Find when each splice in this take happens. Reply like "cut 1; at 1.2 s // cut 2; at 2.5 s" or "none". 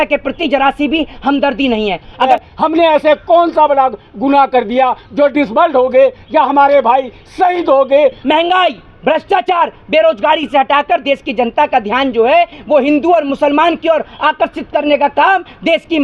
cut 1; at 2.3 s // cut 2; at 8.2 s

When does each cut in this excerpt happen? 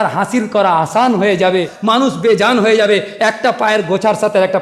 cut 1; at 1.7 s

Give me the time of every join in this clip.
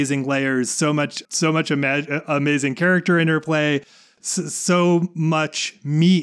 cut 1; at 1.2 s

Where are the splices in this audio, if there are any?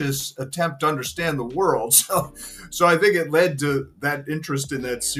none

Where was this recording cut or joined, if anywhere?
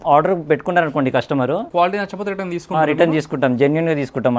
cut 1; at 1.7 s

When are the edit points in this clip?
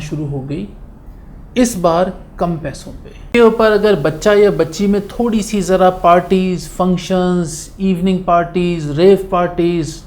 cut 1; at 3.2 s

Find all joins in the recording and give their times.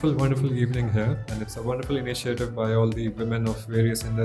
none

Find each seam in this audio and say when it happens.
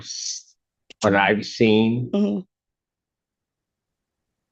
none

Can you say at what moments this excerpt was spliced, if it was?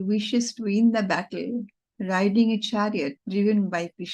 cut 1; at 3.2 s

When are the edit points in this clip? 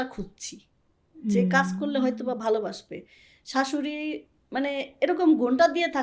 none

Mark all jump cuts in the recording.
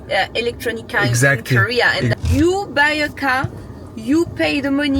cut 1; at 2.1 s

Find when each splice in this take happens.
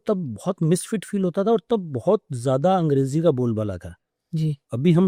none

